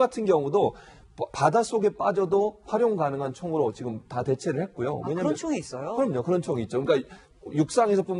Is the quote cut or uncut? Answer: uncut